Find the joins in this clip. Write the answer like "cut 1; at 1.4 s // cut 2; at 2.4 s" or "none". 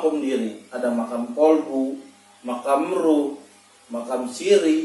none